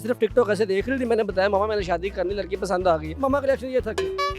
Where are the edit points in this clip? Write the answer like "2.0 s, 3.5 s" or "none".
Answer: 3.2 s

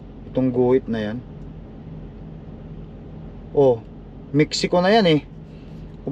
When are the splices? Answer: none

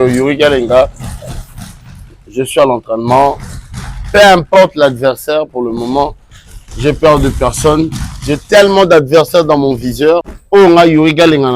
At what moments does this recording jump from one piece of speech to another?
10.3 s

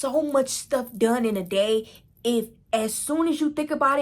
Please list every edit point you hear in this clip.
2.6 s

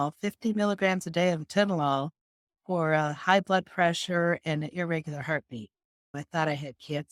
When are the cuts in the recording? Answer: 6.1 s

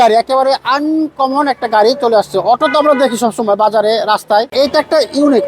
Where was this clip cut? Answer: 4.5 s

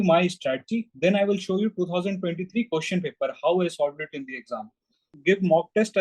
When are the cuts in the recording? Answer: 5.1 s

